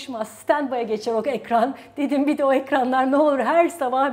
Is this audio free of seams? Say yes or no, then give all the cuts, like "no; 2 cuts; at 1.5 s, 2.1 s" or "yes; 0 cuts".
yes; 0 cuts